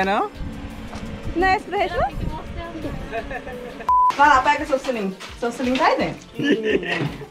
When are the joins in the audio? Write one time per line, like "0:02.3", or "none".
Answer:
0:03.9
0:06.2